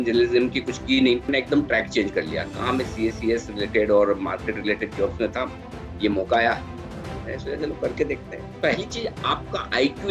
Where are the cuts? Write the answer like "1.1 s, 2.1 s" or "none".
1.3 s, 8.6 s